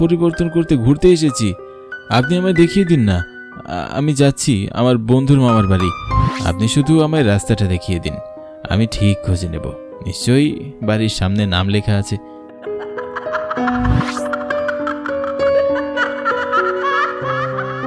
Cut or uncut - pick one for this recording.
uncut